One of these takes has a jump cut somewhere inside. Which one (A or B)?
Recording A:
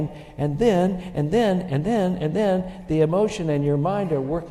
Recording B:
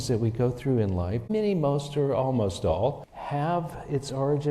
B